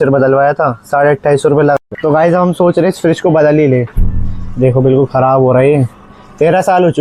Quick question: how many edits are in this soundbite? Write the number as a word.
one